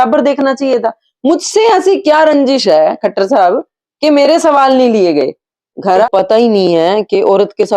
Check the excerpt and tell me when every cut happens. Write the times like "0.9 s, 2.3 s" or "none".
6.1 s